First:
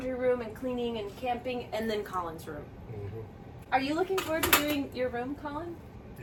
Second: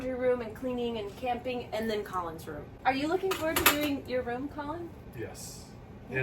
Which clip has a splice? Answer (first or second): second